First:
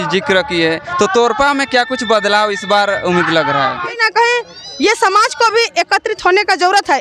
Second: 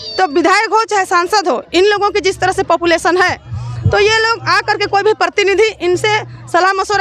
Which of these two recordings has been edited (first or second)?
first